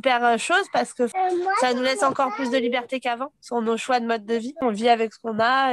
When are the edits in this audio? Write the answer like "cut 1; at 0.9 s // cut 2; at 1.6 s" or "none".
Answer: cut 1; at 1.1 s // cut 2; at 4.6 s